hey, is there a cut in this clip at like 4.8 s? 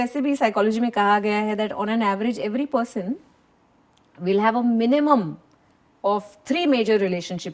no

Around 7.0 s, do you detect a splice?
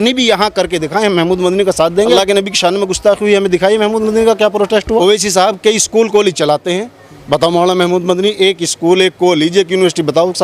no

